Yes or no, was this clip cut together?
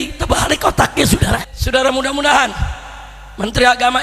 yes